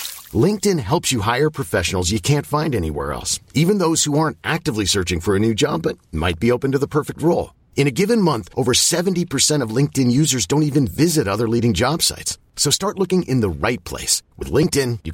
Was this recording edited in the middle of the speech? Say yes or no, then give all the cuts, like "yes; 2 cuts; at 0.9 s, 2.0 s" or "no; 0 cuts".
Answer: no; 0 cuts